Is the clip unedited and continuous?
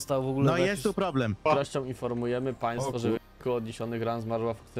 no; 1 cut; at 1.4 s

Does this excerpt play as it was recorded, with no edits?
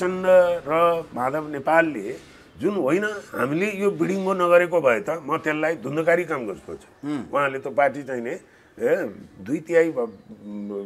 yes; 0 cuts

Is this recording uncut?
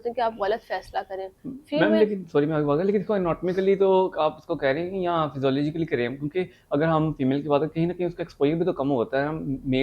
yes; 0 cuts

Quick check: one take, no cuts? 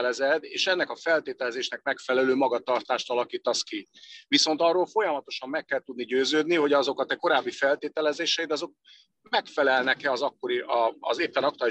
yes; 0 cuts

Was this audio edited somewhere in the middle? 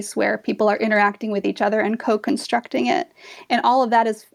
no; 0 cuts

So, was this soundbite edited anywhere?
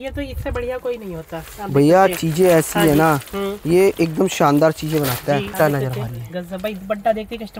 yes; 1 cut; at 5.5 s

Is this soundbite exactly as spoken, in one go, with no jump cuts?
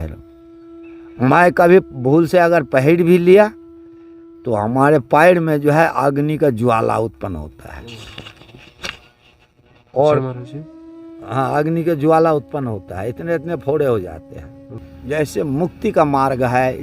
no; 1 cut; at 14.9 s

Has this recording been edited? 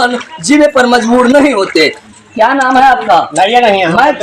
yes; 1 cut; at 2.0 s

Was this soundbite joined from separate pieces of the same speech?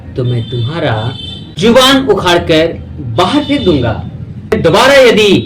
yes; 1 cut; at 4.5 s

